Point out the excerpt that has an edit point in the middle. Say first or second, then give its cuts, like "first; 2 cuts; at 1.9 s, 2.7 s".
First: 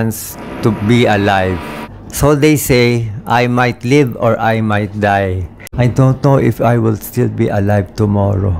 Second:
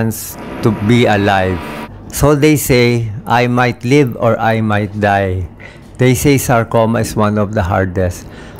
first; 1 cut; at 5.7 s